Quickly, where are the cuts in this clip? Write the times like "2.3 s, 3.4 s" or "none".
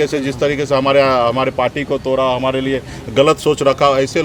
none